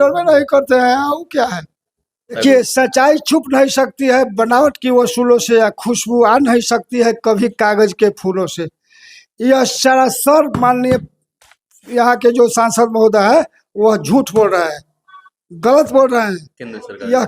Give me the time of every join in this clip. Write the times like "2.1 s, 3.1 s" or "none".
2.4 s